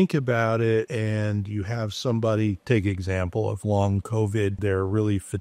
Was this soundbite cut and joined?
yes; 2 cuts; at 0.9 s, 4.6 s

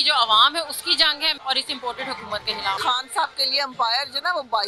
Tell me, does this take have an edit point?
yes; 2 cuts; at 1.4 s, 2.8 s

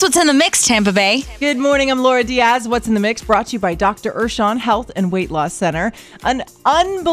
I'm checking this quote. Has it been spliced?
yes; 1 cut; at 1.3 s

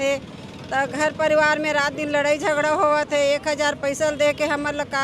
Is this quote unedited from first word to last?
yes; 0 cuts

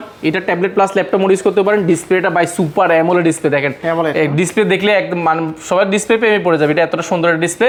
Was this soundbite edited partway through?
no; 0 cuts

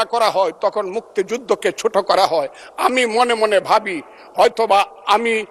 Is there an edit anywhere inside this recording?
no; 0 cuts

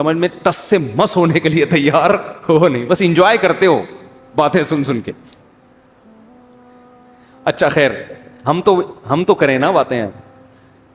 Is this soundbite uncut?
yes; 0 cuts

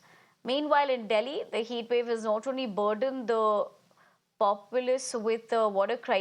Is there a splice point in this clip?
no; 0 cuts

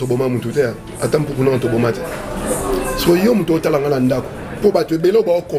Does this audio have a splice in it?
no; 0 cuts

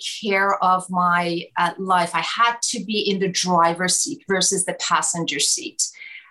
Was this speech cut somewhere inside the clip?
no; 0 cuts

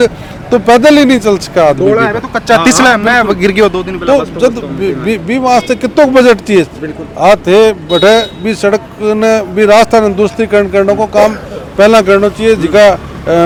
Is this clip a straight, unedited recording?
yes; 0 cuts

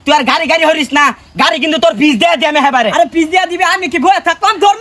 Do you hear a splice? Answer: no; 0 cuts

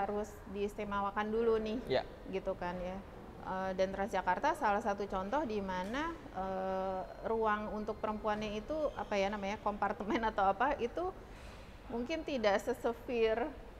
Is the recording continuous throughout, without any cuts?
yes; 0 cuts

